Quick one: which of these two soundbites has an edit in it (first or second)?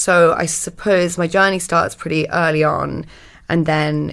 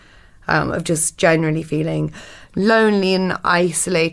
first